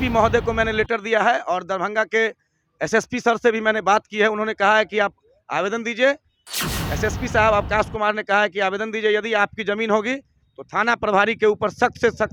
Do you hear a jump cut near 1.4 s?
no; 0 cuts

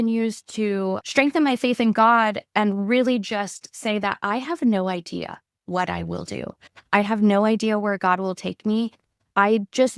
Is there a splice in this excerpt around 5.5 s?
no; 1 cut; at 1.0 s

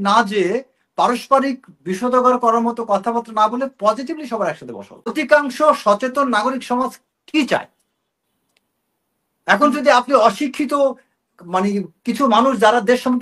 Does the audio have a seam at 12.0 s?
no; 1 cut; at 5.1 s

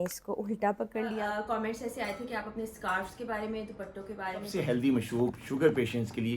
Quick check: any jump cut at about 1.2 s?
yes; 2 cuts; at 1.2 s, 4.5 s

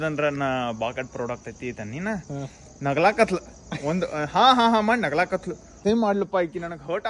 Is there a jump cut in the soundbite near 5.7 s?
yes; 1 cut; at 5.7 s

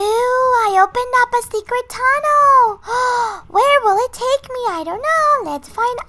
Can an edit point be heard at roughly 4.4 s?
no; 0 cuts

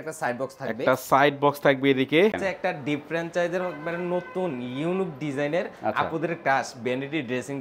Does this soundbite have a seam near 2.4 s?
yes; 1 cut; at 2.4 s

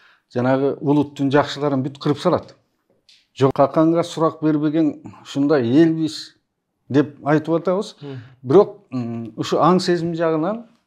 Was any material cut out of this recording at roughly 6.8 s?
no; 1 cut; at 3.5 s

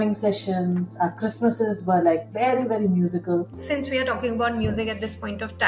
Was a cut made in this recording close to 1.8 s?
no; 1 cut; at 3.6 s

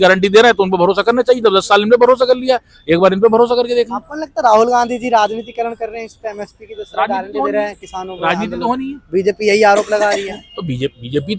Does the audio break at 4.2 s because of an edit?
no; 0 cuts

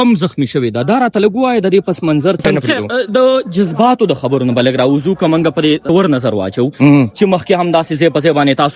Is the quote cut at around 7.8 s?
no; 2 cuts; at 2.5 s, 5.8 s

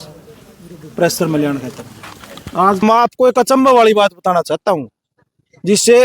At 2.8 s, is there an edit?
yes; 1 cut; at 2.8 s

